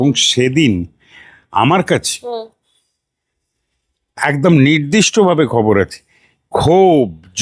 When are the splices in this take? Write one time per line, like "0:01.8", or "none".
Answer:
none